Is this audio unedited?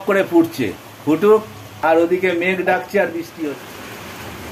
no; 2 cuts; at 1.7 s, 3.5 s

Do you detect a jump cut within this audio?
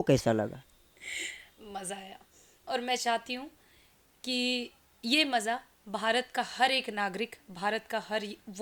no; 0 cuts

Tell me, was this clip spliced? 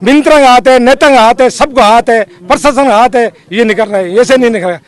no; 0 cuts

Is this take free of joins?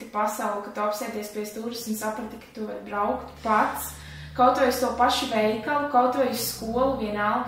yes; 0 cuts

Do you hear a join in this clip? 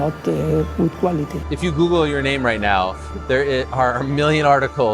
yes; 1 cut; at 1.4 s

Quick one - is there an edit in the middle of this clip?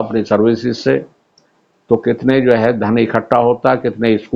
no; 0 cuts

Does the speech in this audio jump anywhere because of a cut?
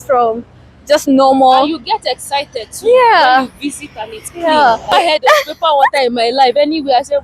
yes; 1 cut; at 4.9 s

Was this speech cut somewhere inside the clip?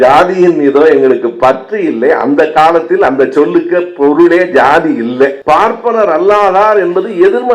yes; 1 cut; at 5.4 s

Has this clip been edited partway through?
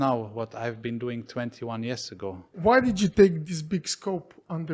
yes; 1 cut; at 2.6 s

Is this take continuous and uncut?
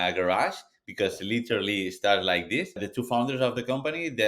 no; 1 cut; at 2.9 s

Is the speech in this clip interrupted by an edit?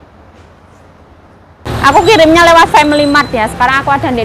yes; 1 cut; at 1.7 s

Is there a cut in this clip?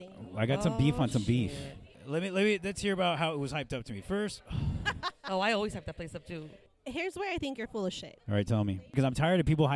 yes; 3 cuts; at 2.0 s, 6.6 s, 8.9 s

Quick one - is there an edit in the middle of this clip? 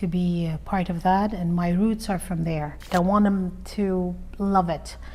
yes; 1 cut; at 2.9 s

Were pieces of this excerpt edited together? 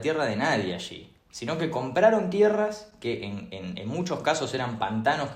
no; 0 cuts

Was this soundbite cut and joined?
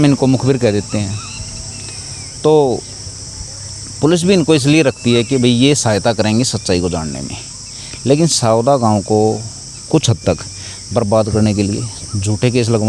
no; 0 cuts

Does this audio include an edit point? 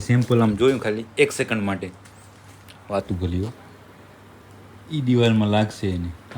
no; 0 cuts

